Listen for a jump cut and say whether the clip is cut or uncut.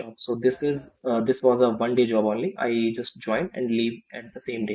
uncut